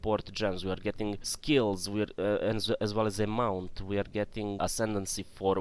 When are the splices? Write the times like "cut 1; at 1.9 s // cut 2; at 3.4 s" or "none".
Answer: cut 1; at 1.3 s // cut 2; at 4.6 s